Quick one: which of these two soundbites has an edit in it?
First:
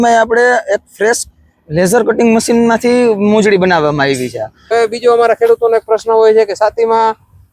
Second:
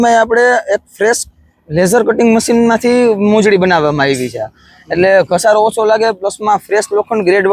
first; 1 cut; at 4.7 s

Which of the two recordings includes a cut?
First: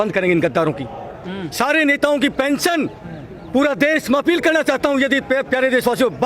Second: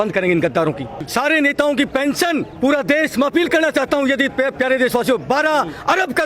second; 2 cuts; at 0.9 s, 2.5 s

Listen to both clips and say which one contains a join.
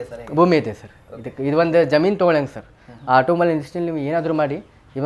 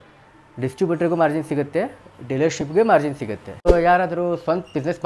second; 1 cut; at 3.6 s

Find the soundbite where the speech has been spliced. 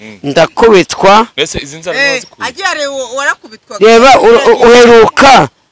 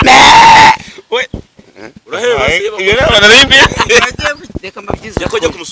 second; 1 cut; at 4.5 s

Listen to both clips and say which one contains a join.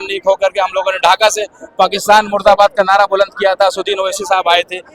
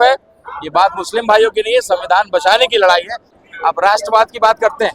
second; 1 cut; at 3.3 s

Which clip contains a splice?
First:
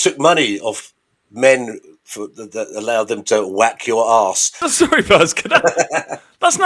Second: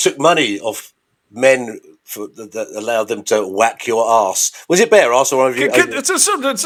first; 1 cut; at 4.6 s

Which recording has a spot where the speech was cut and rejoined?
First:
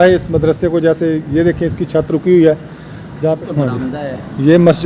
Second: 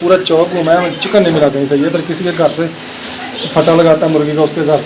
first; 1 cut; at 3.4 s

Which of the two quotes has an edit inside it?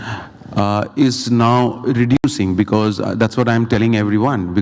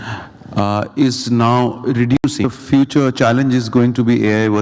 second; 1 cut; at 2.4 s

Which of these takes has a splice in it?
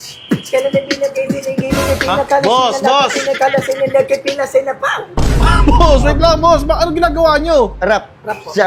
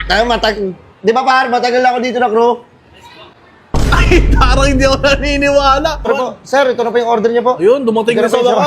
second; 1 cut; at 6.1 s

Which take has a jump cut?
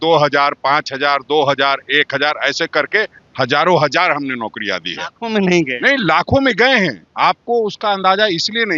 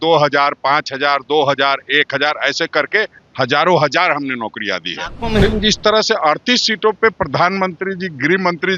second; 1 cut; at 5.4 s

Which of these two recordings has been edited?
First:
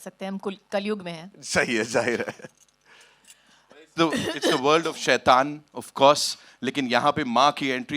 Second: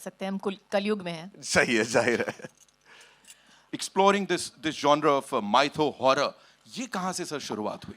second; 1 cut; at 3.7 s

